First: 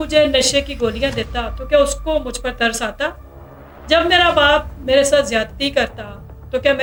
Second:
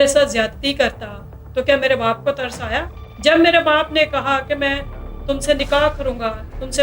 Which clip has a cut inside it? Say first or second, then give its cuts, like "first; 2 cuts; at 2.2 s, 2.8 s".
second; 1 cut; at 3.0 s